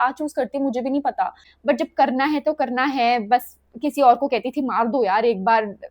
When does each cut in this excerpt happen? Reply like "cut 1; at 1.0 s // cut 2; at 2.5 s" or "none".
cut 1; at 1.5 s